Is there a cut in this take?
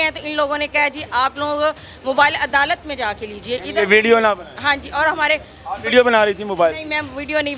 no; 0 cuts

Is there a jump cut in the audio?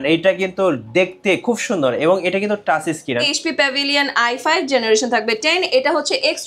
yes; 1 cut; at 3.2 s

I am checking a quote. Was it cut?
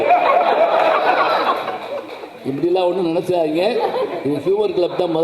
no; 0 cuts

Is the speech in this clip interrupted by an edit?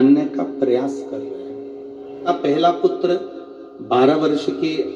yes; 1 cut; at 2.3 s

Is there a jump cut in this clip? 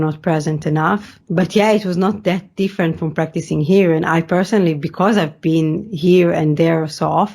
yes; 1 cut; at 1.2 s

